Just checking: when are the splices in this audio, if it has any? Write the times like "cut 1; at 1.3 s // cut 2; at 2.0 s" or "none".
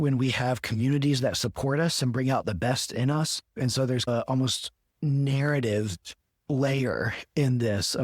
cut 1; at 3.5 s